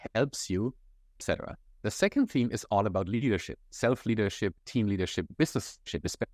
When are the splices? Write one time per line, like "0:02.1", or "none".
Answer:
0:01.2